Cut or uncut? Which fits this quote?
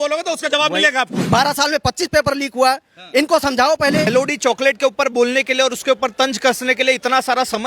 cut